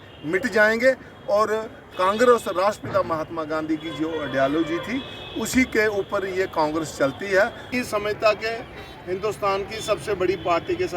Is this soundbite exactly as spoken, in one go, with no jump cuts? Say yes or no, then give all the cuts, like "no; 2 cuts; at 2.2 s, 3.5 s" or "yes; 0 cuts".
no; 1 cut; at 7.7 s